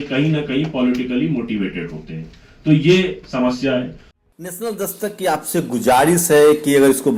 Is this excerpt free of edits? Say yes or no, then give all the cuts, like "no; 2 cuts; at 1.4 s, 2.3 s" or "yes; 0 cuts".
yes; 0 cuts